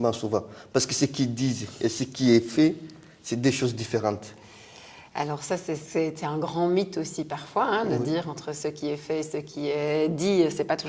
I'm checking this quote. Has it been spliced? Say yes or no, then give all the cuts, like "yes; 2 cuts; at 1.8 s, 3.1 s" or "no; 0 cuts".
no; 0 cuts